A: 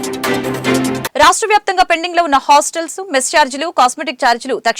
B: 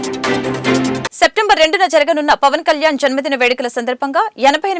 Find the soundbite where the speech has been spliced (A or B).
A